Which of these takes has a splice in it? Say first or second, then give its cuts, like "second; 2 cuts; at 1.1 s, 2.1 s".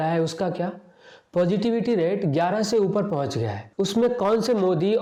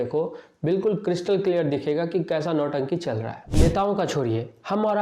second; 1 cut; at 3.4 s